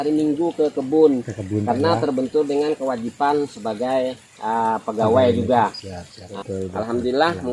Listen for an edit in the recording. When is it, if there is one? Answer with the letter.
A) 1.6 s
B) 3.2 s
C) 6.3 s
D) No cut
C